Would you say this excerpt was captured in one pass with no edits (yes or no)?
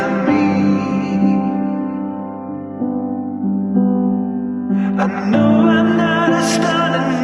yes